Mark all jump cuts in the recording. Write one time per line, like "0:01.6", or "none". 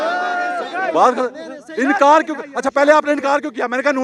none

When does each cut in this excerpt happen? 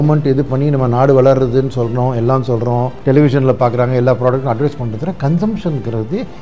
none

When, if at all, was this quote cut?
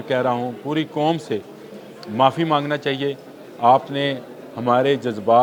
none

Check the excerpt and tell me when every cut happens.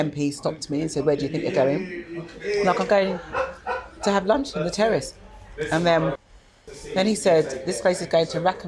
none

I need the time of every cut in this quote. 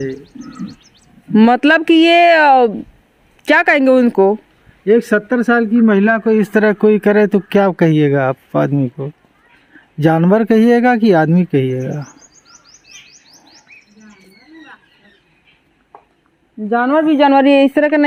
none

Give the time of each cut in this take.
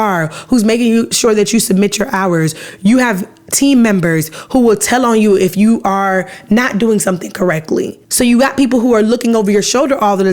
0:08.0

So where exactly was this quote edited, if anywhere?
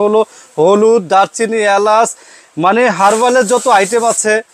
none

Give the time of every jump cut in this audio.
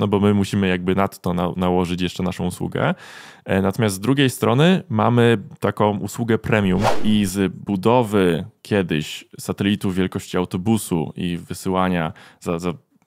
0:07.0

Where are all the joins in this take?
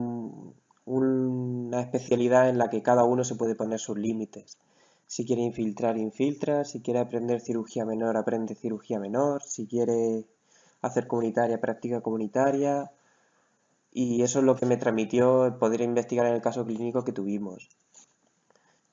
0:10.6

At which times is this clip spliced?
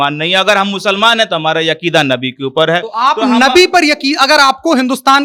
none

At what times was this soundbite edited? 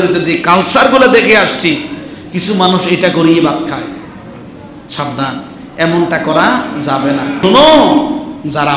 0:07.3

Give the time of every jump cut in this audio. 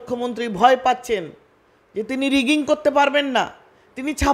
none

